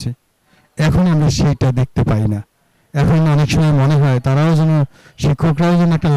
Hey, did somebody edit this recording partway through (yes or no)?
no